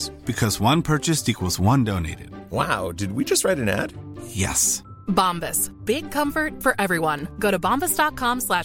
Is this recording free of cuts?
yes; 0 cuts

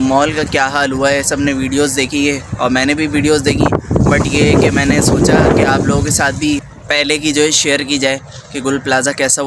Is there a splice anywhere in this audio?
no; 0 cuts

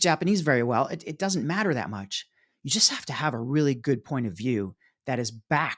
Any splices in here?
no; 0 cuts

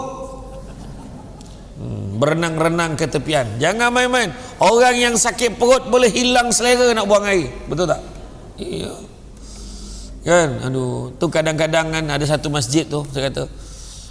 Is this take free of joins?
yes; 0 cuts

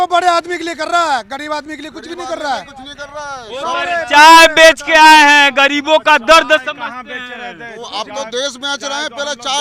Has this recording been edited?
no; 0 cuts

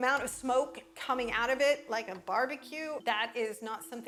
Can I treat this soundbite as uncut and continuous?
yes; 0 cuts

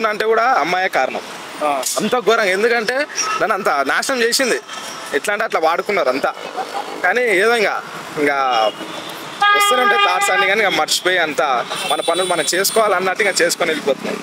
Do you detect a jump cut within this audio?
no; 0 cuts

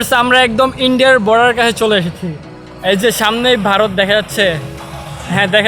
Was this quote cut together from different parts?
no; 0 cuts

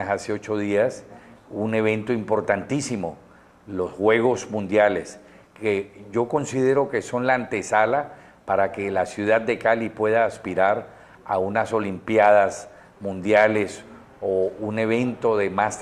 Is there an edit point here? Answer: no; 0 cuts

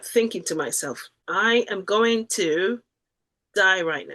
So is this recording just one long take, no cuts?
no; 1 cut; at 1.2 s

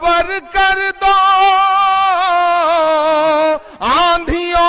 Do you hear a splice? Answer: yes; 1 cut; at 3.7 s

